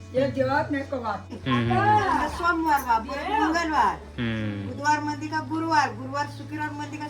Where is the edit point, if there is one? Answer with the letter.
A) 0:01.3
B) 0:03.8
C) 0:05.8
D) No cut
A